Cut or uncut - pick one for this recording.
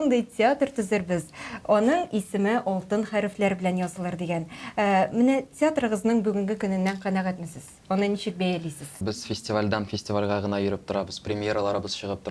cut